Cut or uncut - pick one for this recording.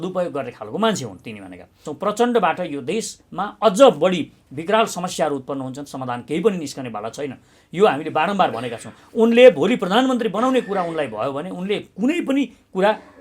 cut